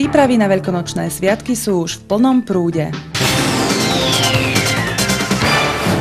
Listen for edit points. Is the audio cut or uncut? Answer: cut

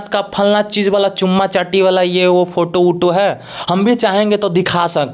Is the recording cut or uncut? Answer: uncut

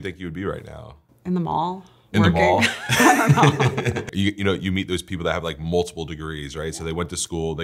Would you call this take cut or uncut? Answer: cut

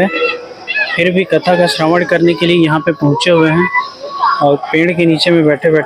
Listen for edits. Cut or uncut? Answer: uncut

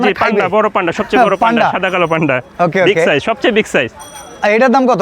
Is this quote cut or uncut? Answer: uncut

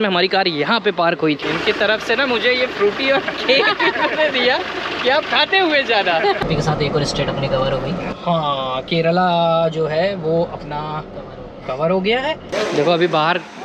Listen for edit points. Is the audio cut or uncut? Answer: cut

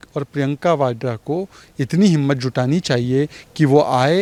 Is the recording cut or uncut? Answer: uncut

